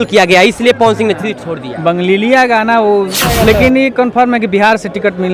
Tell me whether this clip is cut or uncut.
cut